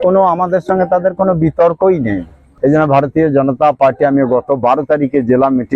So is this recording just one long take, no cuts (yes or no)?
no